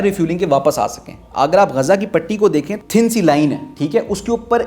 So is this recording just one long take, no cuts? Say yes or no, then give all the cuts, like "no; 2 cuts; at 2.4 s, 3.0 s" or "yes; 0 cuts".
no; 2 cuts; at 1.1 s, 2.7 s